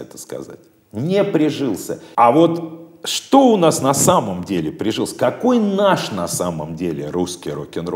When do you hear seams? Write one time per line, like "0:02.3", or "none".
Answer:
0:02.0